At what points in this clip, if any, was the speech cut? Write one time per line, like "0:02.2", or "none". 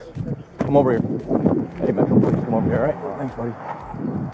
none